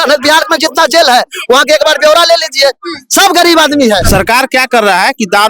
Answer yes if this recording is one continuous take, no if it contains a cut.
no